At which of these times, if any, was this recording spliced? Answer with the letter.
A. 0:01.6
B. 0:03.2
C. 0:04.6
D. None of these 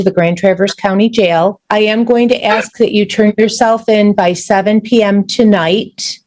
A